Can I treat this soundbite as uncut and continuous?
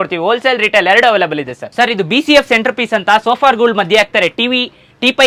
yes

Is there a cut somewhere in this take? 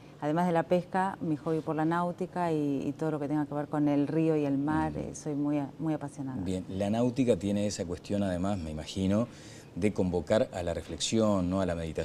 no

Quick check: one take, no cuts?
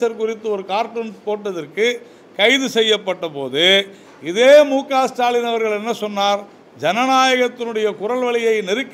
yes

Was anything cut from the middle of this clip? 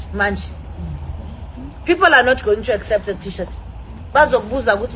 no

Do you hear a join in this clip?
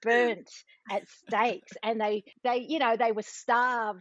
no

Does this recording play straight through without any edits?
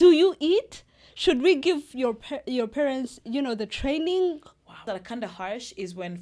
no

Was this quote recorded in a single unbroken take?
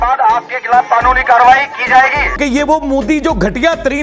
no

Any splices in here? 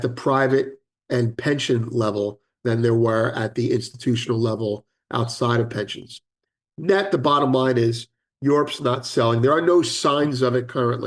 no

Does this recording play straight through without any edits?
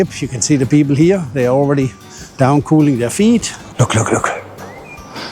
no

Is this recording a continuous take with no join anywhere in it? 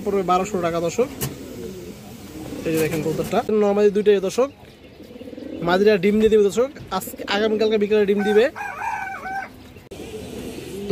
no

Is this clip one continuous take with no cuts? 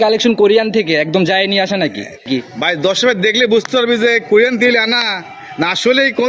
yes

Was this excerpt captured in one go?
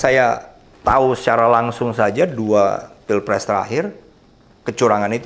yes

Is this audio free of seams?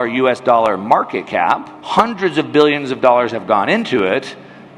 no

